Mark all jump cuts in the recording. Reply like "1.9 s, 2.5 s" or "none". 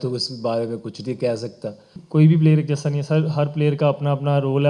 1.9 s

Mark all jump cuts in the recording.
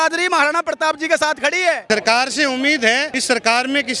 1.8 s, 3.1 s

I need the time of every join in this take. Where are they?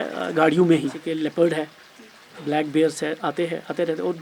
1.0 s

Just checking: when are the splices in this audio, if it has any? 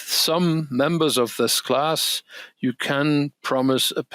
none

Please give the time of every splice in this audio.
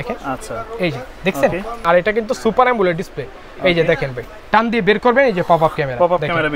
1.8 s, 4.3 s

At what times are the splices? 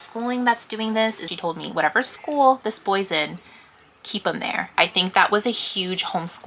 1.3 s, 4.8 s

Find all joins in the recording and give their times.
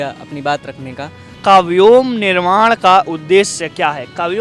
1.4 s

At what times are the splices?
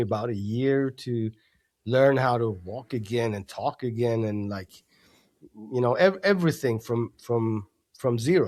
none

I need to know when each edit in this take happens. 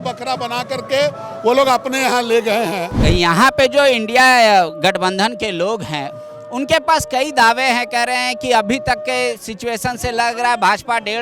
2.9 s

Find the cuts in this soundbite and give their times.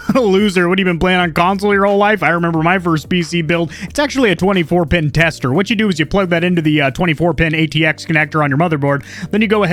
none

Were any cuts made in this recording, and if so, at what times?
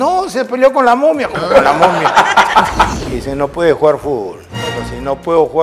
2.9 s, 4.4 s

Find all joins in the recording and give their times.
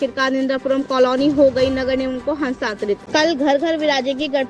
3.0 s

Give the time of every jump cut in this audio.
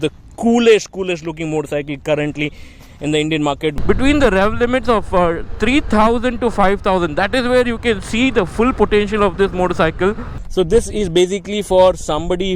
3.8 s, 10.4 s

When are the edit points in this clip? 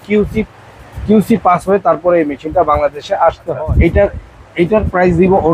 3.5 s

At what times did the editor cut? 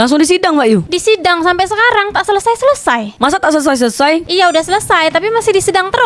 none

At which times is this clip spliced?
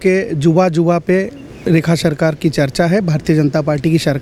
none

